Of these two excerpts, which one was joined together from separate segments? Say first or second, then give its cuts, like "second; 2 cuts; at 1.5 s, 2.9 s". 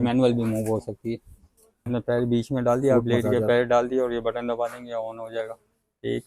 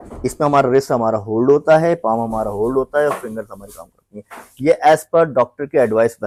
first; 1 cut; at 1.9 s